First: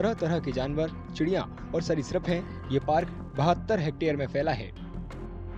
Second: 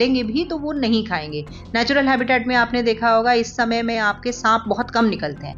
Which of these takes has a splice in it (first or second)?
first